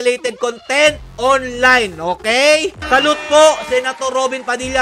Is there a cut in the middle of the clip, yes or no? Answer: yes